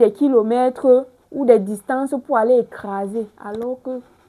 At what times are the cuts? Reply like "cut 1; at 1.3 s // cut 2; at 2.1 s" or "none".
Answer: none